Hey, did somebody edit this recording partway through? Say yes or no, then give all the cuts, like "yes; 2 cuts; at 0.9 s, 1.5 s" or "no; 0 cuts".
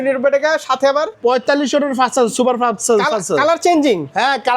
yes; 1 cut; at 1.1 s